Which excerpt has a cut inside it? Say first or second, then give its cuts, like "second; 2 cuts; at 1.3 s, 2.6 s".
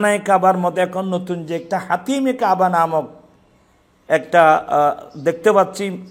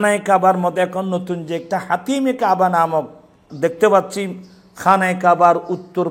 second; 1 cut; at 3.4 s